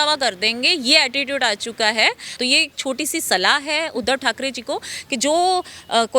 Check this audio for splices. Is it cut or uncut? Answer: cut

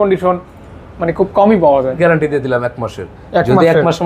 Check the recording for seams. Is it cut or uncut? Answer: cut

